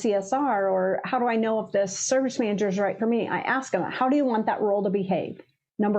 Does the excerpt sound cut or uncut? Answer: uncut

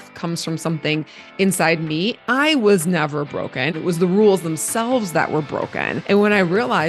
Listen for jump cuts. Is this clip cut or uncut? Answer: cut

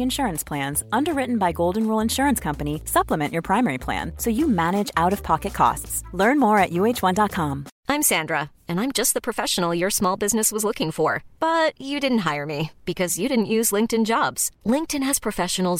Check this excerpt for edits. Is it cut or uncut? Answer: cut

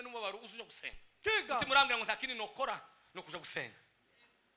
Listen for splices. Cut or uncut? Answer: uncut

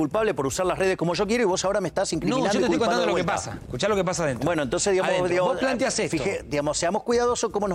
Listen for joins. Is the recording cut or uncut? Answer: uncut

